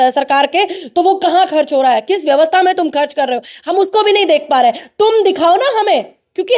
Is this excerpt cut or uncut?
uncut